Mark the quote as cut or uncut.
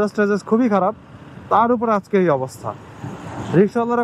uncut